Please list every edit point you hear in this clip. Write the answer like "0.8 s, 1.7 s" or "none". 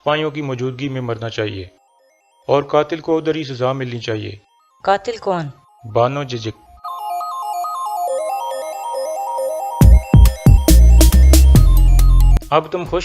8.8 s